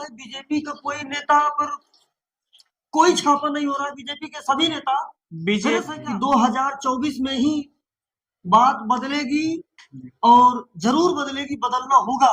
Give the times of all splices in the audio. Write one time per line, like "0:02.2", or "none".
0:05.9